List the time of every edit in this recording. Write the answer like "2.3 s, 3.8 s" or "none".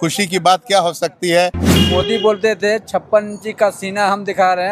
1.8 s